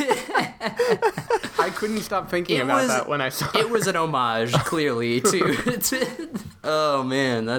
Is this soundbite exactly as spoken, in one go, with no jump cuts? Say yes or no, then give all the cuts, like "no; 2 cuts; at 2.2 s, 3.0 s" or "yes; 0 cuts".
no; 1 cut; at 6.5 s